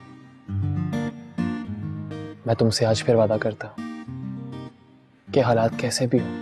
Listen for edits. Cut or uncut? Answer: uncut